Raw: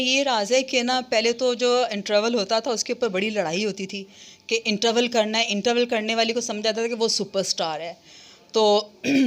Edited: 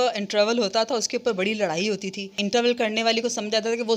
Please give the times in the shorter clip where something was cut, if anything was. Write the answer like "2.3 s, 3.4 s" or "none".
2.4 s